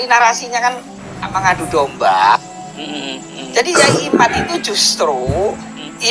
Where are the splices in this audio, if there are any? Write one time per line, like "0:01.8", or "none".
none